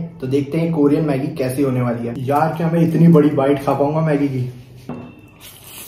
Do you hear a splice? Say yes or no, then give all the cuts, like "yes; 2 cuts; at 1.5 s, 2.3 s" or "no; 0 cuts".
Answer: yes; 2 cuts; at 2.1 s, 4.9 s